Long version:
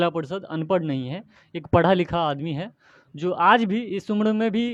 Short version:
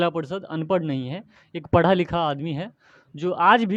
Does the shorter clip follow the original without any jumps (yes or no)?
yes